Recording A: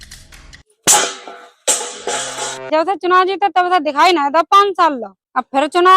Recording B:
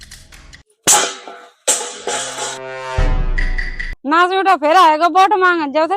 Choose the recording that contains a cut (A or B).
A